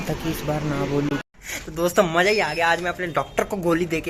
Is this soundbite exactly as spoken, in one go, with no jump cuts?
no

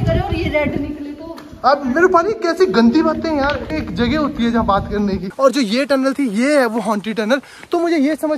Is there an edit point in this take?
yes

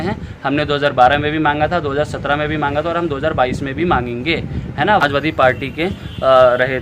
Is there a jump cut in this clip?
yes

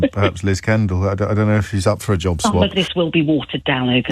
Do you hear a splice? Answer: yes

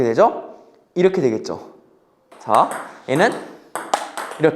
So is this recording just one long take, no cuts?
no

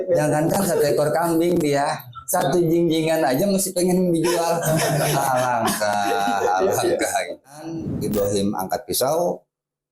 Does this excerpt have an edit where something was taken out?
yes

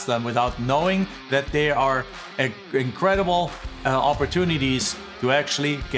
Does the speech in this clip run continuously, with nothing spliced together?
yes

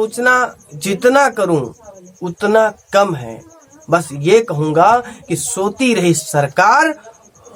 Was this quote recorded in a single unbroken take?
yes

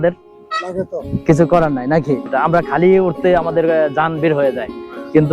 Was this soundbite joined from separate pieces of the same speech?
yes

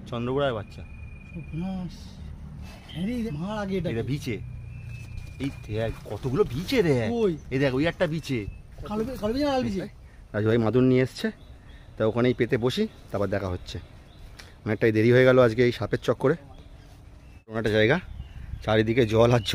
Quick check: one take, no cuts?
no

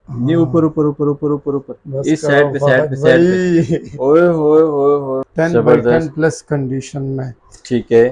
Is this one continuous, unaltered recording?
no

